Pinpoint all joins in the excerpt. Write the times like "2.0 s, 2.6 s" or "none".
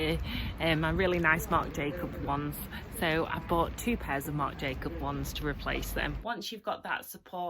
6.2 s